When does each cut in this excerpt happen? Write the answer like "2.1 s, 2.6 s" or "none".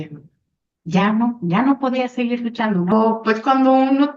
2.9 s